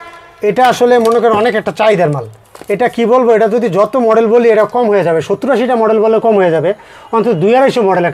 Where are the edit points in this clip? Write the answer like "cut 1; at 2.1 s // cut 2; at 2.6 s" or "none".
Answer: none